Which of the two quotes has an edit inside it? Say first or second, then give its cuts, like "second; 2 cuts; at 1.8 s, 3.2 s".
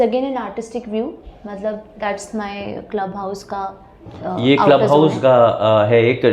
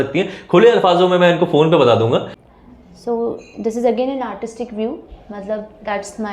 second; 1 cut; at 2.3 s